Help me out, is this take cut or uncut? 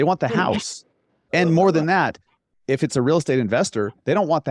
cut